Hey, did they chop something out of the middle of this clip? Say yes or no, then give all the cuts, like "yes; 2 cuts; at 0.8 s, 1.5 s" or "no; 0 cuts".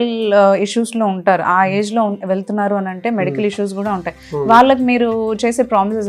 no; 0 cuts